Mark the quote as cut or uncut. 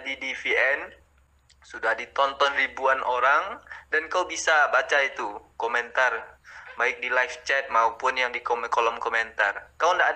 uncut